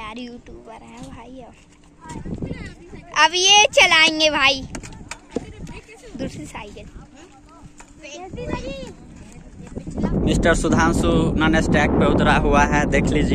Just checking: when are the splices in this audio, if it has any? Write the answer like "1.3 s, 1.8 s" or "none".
2.1 s, 10.1 s